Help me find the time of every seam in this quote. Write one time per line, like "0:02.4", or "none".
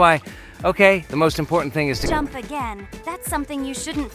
0:02.0